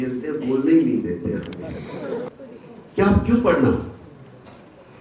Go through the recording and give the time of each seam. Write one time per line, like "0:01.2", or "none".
0:02.4